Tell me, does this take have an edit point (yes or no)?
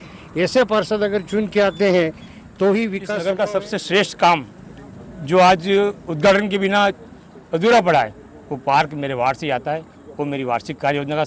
yes